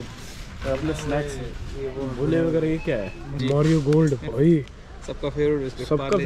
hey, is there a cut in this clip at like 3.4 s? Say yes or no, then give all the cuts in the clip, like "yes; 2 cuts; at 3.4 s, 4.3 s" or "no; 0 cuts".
yes; 1 cut; at 3.4 s